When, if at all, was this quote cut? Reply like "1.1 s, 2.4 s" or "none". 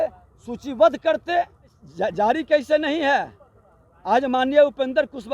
1.8 s